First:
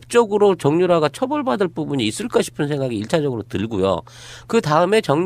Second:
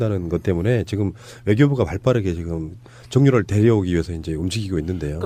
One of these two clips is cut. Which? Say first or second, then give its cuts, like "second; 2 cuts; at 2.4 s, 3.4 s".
first; 1 cut; at 1.7 s